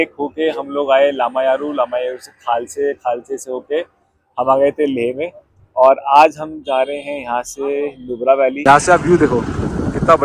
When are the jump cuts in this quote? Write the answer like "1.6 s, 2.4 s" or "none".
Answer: 8.6 s